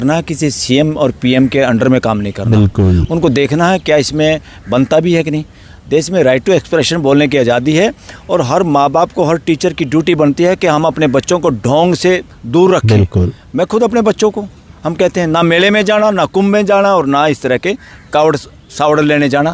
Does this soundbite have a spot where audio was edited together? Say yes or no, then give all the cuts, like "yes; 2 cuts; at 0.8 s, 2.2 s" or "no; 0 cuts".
no; 0 cuts